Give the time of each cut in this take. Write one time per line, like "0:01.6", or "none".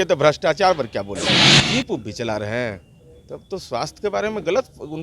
0:01.5